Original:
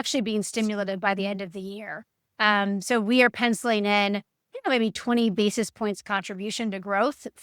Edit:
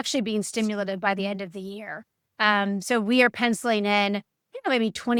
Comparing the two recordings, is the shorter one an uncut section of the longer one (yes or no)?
yes